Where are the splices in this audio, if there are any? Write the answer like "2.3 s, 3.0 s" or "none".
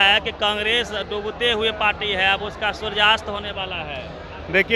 none